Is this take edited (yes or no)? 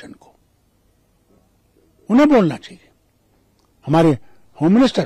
no